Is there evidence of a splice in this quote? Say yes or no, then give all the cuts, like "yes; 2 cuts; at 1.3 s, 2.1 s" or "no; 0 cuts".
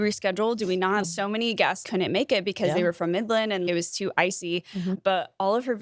no; 0 cuts